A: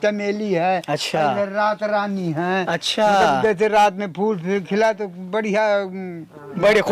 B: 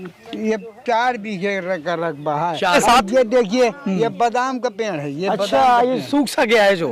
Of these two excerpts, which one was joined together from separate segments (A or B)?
B